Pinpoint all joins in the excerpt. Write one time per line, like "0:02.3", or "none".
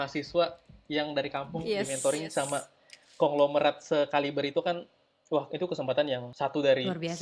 0:06.3